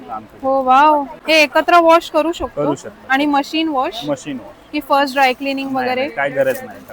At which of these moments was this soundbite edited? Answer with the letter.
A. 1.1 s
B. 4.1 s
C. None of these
A